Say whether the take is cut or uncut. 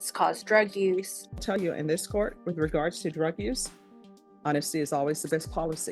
cut